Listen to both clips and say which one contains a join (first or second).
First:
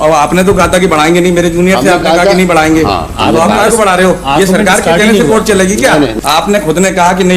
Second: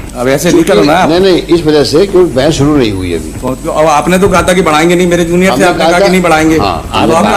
first